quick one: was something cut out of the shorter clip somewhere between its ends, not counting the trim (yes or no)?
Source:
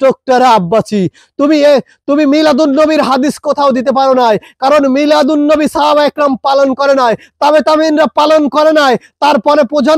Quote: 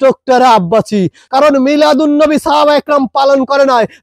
yes